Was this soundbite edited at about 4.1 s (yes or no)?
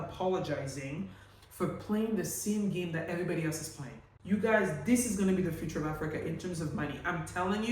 yes